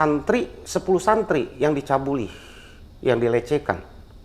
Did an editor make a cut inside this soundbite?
no; 0 cuts

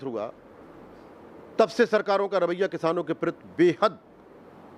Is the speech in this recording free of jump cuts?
yes; 0 cuts

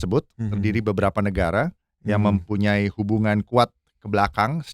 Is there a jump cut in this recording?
no; 0 cuts

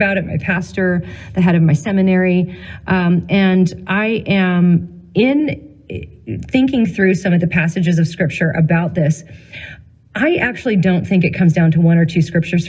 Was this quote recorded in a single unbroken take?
yes; 0 cuts

